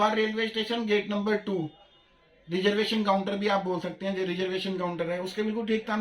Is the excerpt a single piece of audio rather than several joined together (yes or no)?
yes